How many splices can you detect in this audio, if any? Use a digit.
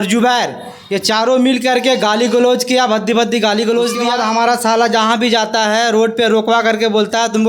1